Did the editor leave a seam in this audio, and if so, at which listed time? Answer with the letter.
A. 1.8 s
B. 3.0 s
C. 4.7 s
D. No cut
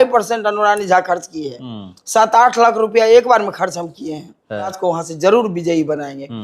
C